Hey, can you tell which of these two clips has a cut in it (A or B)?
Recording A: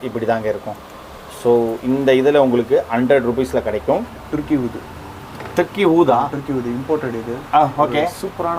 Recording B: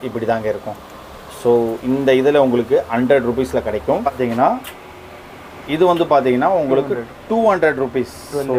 A